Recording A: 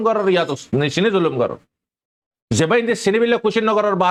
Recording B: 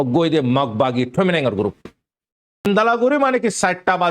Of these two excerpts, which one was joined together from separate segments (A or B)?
B